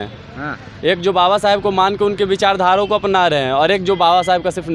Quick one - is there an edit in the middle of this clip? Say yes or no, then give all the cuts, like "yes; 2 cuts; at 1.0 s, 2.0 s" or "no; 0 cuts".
no; 0 cuts